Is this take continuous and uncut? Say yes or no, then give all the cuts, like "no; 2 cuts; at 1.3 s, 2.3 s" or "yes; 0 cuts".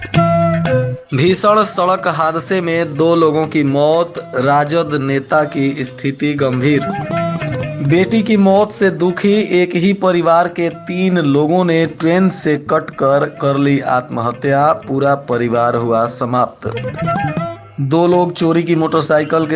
no; 1 cut; at 1.0 s